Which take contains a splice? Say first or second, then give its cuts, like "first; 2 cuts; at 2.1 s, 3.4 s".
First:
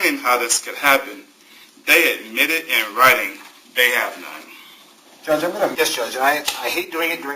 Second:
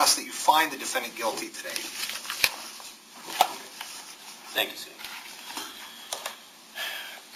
first; 1 cut; at 5.7 s